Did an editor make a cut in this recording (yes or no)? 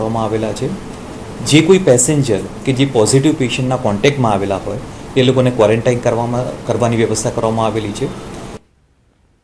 no